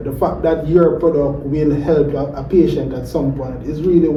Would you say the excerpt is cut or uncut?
uncut